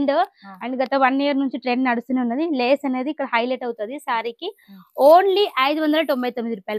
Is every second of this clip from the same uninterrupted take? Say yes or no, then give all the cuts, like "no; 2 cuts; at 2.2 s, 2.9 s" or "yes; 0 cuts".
yes; 0 cuts